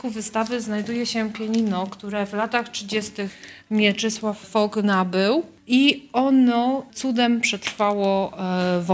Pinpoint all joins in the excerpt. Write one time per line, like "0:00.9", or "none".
0:04.5
0:05.6
0:06.9